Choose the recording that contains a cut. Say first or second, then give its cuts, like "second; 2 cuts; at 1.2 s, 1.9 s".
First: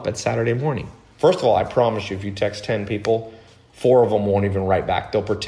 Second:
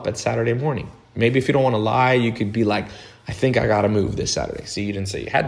first; 1 cut; at 1.0 s